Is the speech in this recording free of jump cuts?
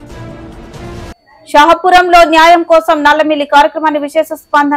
yes; 0 cuts

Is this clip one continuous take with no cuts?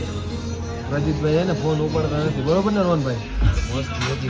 no; 1 cut; at 3.3 s

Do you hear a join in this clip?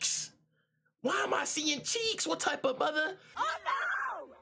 yes; 1 cut; at 3.2 s

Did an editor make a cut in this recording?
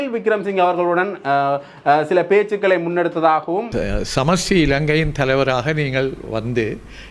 yes; 1 cut; at 3.7 s

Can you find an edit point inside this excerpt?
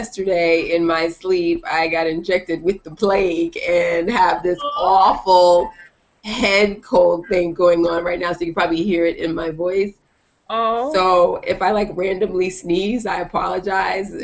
yes; 1 cut; at 2.4 s

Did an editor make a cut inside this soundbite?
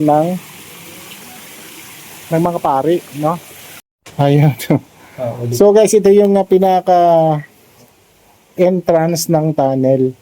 yes; 1 cut; at 3.9 s

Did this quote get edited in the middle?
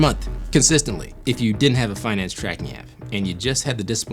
yes; 1 cut; at 1.1 s

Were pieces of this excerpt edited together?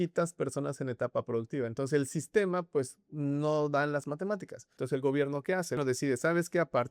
yes; 2 cuts; at 4.7 s, 5.8 s

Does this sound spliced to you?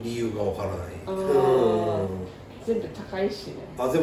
no; 0 cuts

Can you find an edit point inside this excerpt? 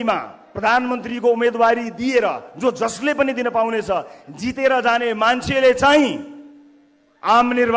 no; 0 cuts

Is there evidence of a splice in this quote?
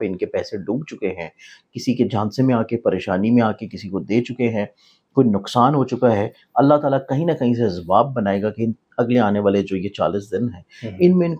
no; 0 cuts

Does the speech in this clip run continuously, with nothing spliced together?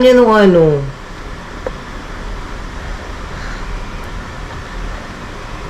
yes; 0 cuts

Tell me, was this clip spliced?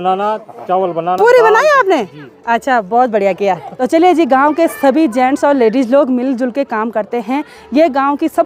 no; 0 cuts

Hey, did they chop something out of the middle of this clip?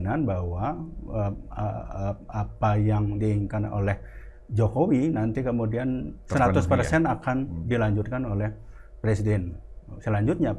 no; 0 cuts

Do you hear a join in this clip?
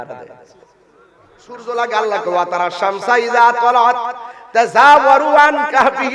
yes; 1 cut; at 1.6 s

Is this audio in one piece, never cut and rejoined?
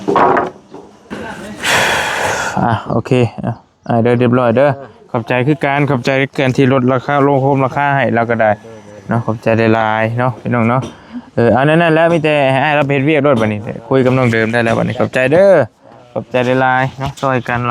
no; 1 cut; at 1.1 s

